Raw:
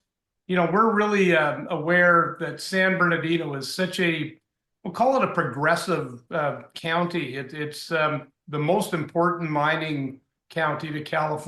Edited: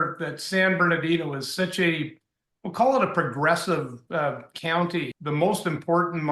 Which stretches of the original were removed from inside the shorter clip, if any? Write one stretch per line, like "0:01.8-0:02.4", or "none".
0:07.3-0:08.4